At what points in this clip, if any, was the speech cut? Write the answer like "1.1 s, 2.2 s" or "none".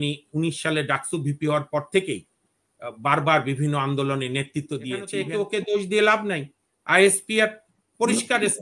5.1 s